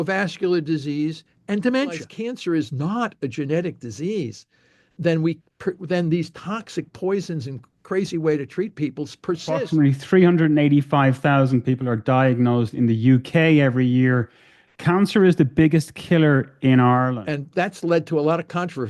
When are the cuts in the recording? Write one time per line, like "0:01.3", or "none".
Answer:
0:02.1
0:09.6
0:17.2